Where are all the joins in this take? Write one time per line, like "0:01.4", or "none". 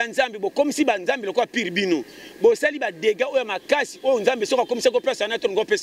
none